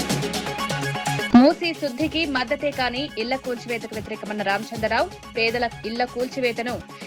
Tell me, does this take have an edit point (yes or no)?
yes